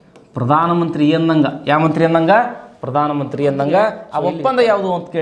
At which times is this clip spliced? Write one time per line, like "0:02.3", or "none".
0:04.1